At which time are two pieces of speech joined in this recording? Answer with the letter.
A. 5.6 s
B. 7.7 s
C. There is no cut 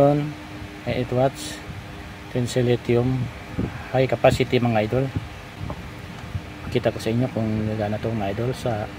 A